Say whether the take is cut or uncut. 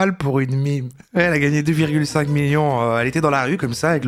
uncut